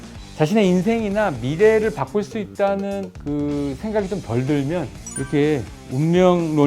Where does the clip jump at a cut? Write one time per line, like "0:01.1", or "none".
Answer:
0:03.1